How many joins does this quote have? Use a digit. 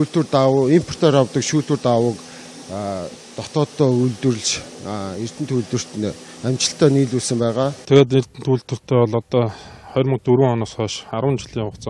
1